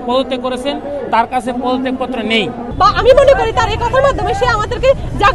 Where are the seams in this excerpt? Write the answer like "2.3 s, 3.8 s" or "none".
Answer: 2.6 s